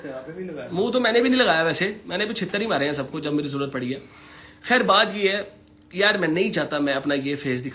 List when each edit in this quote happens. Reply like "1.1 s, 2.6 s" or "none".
none